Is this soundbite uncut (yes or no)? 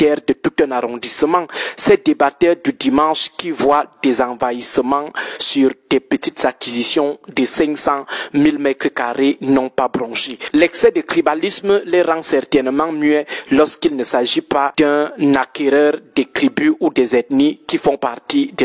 yes